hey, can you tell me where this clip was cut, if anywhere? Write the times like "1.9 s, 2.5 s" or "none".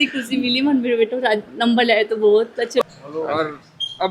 2.8 s

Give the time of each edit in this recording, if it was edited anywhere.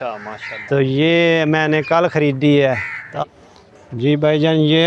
3.0 s

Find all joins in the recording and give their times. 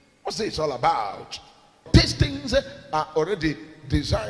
1.9 s

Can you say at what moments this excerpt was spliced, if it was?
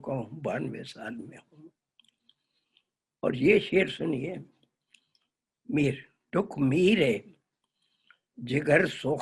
none

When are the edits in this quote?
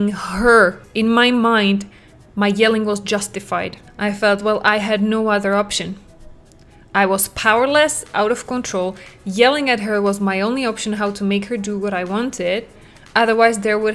0.8 s, 3.8 s

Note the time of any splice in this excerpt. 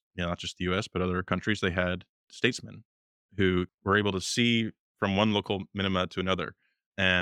1.3 s, 2.3 s, 3.7 s, 4.8 s

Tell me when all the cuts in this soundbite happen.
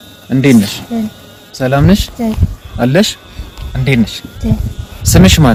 none

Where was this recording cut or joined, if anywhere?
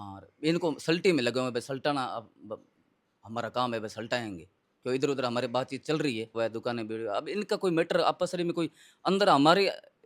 6.4 s

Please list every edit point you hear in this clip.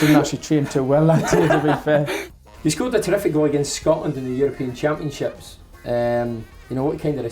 2.2 s

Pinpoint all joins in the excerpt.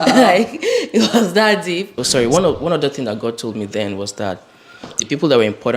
2.0 s

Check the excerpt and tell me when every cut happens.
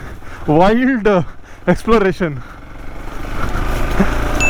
none

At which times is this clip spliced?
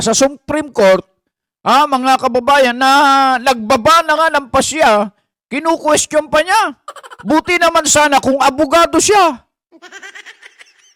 none

